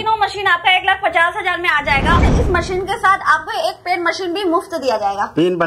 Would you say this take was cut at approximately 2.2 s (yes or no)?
yes